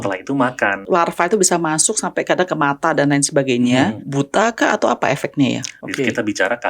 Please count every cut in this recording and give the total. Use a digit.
3